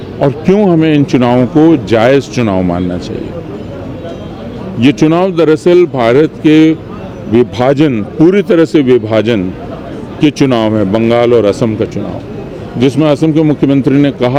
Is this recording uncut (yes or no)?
yes